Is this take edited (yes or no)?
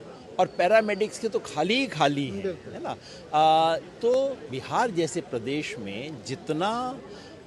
no